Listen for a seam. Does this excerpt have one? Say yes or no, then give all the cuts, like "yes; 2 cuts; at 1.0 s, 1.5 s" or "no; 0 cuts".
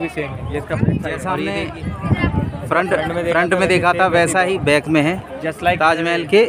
yes; 1 cut; at 1.4 s